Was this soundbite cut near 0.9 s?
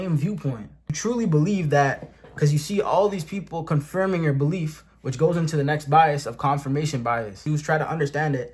yes; 2 cuts; at 0.9 s, 7.4 s

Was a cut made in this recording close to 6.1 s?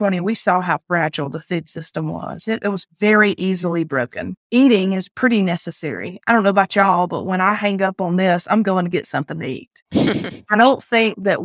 no; 0 cuts

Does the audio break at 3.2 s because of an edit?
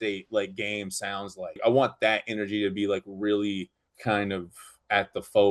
no; 1 cut; at 1.6 s

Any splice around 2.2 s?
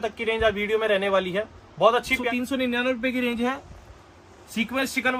yes; 1 cut; at 2.2 s

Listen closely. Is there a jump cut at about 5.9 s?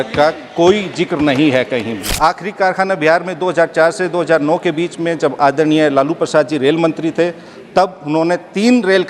no; 1 cut; at 2.1 s

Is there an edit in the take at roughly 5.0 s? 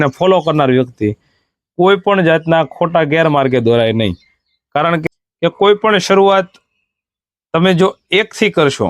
yes; 1 cut; at 5.0 s

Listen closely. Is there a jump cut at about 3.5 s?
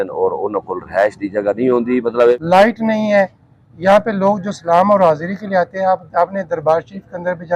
no; 1 cut; at 2.3 s

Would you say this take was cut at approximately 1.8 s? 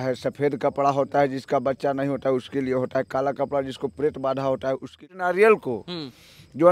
no; 1 cut; at 4.9 s

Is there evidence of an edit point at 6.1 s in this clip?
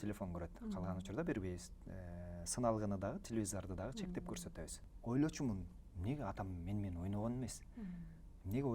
no; 1 cut; at 4.8 s

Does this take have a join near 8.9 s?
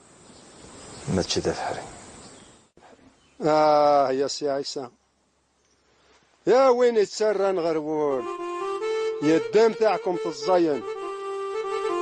no; 0 cuts

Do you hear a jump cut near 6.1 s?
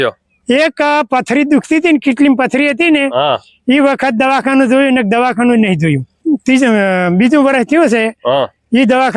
yes; 1 cut; at 6.1 s

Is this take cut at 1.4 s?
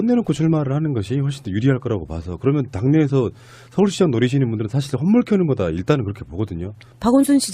no; 1 cut; at 5.6 s

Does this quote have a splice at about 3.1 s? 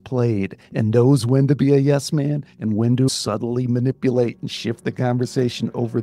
yes; 1 cut; at 3.1 s

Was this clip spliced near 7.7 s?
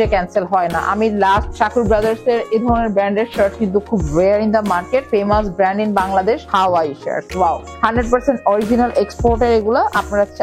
yes; 4 cuts; at 1.5 s, 5.1 s, 6.4 s, 7.7 s

